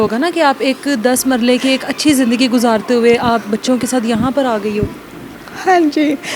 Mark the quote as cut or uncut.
uncut